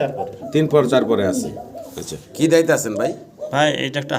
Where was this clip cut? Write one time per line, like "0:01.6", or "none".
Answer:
0:02.2